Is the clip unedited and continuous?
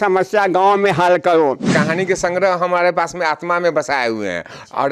no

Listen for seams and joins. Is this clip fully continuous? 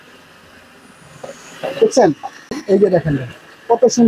no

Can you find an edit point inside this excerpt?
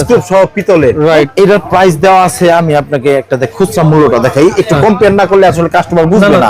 yes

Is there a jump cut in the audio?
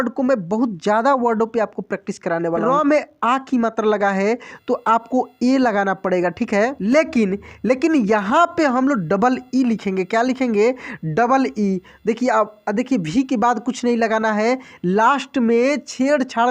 yes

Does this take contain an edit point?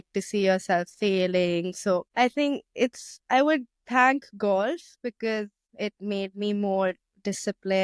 yes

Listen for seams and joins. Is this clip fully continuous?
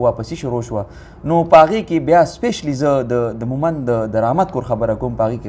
yes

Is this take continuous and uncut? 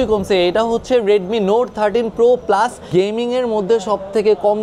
no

